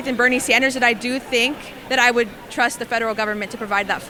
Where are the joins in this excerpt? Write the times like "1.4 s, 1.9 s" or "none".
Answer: none

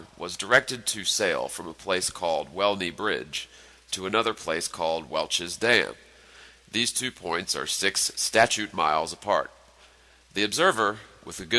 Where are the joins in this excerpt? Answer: none

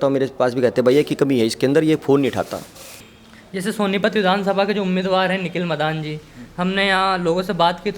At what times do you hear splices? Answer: 3.0 s

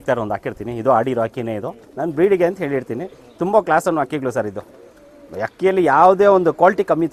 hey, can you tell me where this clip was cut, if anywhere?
none

